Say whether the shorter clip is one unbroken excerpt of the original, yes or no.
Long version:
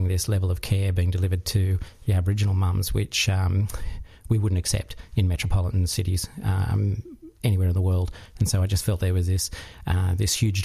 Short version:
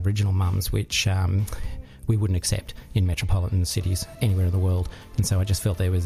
no